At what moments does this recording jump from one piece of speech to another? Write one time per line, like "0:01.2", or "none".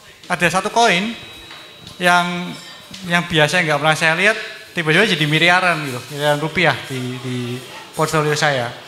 none